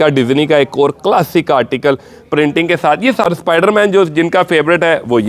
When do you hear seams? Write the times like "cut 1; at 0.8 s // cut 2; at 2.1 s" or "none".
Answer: cut 1; at 3.2 s